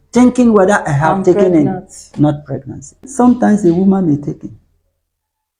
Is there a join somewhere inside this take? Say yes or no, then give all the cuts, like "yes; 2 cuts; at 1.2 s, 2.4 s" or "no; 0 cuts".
yes; 1 cut; at 3.1 s